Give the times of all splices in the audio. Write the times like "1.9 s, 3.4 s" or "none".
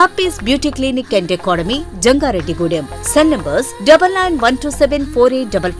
none